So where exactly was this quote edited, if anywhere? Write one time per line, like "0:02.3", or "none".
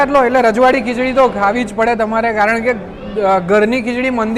none